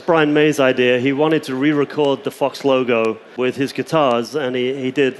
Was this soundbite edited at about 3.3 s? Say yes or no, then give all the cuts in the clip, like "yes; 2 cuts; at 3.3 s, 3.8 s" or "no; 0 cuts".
no; 0 cuts